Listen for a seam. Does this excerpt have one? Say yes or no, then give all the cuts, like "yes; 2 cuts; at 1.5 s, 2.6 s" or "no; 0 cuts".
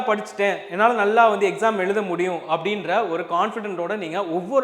no; 0 cuts